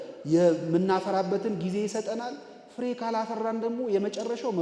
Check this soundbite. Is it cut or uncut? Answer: uncut